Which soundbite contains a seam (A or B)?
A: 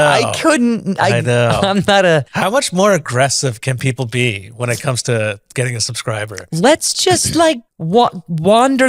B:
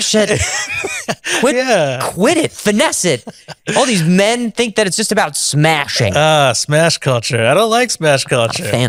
A